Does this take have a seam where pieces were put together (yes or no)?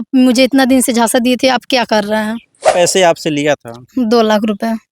yes